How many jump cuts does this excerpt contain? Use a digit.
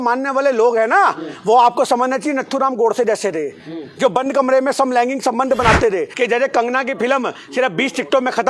1